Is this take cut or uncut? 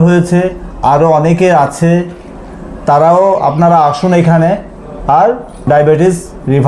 cut